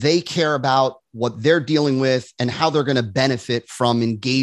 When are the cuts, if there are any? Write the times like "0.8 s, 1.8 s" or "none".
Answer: none